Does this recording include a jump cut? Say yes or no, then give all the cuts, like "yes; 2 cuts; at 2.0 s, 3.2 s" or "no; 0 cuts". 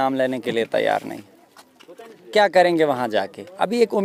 no; 0 cuts